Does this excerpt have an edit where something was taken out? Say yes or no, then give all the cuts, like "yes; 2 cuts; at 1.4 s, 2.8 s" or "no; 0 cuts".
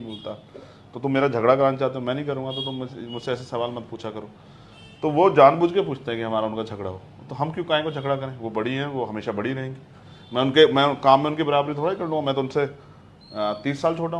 no; 0 cuts